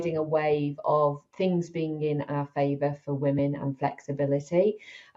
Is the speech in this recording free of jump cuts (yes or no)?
no